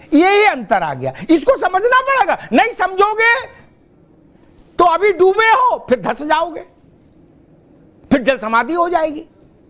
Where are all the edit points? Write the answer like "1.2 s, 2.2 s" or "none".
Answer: none